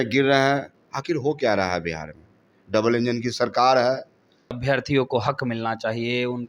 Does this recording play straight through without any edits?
no; 1 cut; at 4.5 s

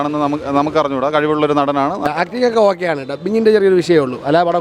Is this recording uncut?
no; 1 cut; at 2.1 s

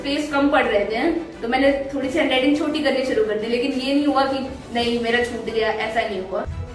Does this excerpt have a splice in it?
no; 0 cuts

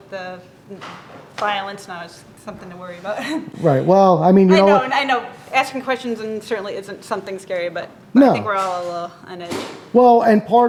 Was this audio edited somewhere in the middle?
no; 0 cuts

